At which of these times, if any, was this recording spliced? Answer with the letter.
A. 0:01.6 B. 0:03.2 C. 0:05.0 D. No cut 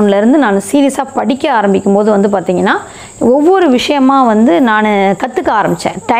D